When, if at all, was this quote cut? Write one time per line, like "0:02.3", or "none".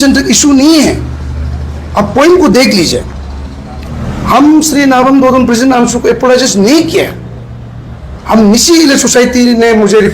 0:03.9